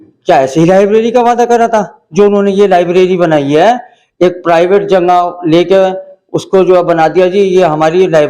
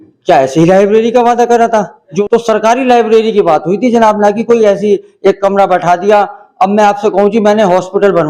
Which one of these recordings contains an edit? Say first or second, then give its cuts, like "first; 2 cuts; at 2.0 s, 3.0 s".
second; 1 cut; at 2.1 s